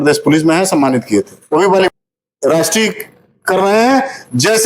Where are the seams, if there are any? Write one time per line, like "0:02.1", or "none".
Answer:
0:01.9